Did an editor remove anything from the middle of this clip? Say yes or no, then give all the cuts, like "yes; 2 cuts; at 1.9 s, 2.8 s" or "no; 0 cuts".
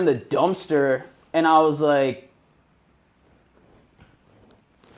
no; 0 cuts